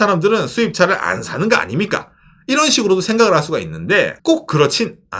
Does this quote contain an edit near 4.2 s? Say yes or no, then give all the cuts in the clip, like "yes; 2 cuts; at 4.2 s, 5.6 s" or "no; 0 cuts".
yes; 1 cut; at 4.2 s